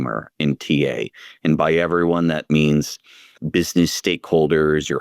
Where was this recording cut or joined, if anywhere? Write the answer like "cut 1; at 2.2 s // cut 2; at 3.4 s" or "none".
cut 1; at 2.5 s

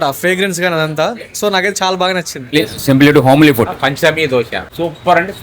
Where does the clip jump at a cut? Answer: cut 1; at 2.5 s // cut 2; at 4.2 s

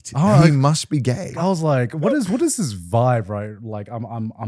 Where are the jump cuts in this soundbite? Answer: cut 1; at 1.4 s

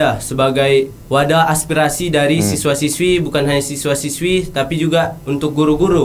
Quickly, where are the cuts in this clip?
cut 1; at 1.0 s

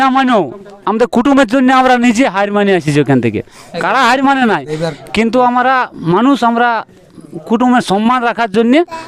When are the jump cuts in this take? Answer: none

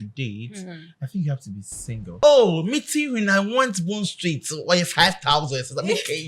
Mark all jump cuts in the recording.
cut 1; at 2.2 s

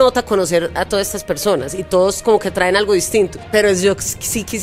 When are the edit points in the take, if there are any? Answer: cut 1; at 3.4 s

